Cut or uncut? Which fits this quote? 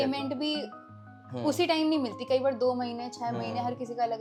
uncut